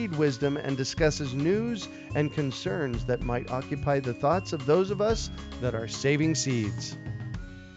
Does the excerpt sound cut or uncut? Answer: cut